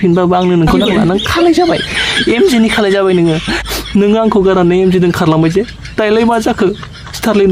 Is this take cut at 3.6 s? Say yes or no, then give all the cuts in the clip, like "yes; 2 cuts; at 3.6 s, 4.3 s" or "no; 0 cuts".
yes; 1 cut; at 3.6 s